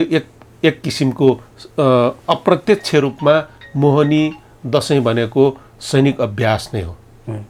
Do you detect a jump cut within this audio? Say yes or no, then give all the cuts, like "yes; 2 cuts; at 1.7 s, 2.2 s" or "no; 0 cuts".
no; 0 cuts